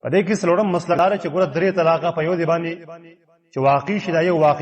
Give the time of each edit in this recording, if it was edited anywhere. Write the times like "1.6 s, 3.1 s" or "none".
1.0 s

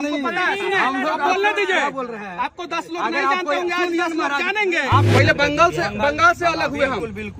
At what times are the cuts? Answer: 5.1 s

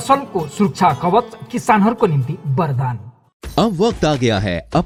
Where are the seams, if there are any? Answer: none

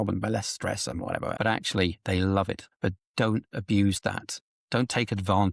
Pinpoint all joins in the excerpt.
1.4 s, 2.6 s, 4.4 s

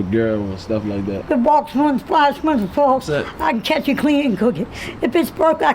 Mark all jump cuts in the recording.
1.1 s

